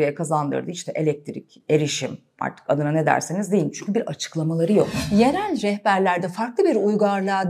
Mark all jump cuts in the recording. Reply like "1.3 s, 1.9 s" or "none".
none